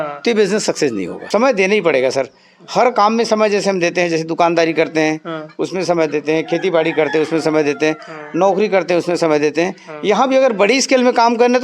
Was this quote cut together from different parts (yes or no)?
yes